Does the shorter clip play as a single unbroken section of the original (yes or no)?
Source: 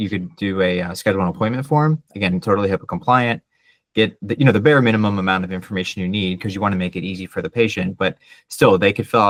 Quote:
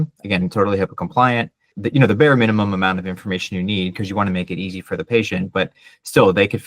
no